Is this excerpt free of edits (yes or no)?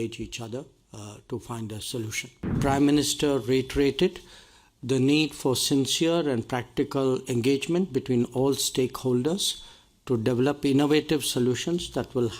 no